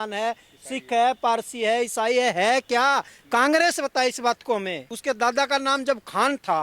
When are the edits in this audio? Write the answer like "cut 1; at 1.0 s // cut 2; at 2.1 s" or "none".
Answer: cut 1; at 4.9 s